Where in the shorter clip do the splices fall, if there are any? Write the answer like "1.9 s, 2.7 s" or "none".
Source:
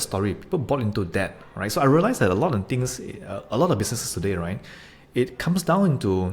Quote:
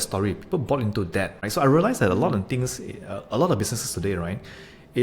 1.4 s